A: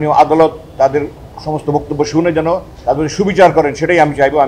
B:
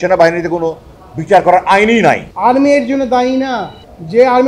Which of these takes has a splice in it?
B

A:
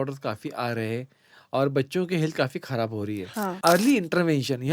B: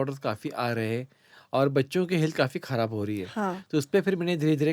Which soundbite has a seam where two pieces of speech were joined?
A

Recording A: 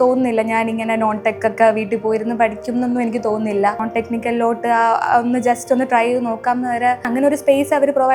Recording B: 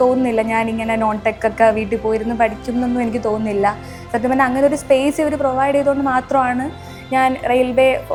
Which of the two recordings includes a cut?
A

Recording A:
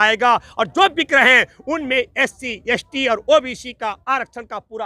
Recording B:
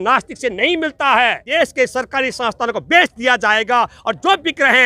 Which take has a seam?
B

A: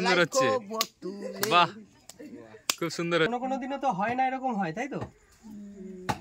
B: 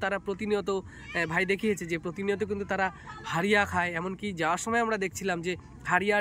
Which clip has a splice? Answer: A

